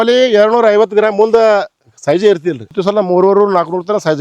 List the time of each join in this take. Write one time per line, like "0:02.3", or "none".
0:02.7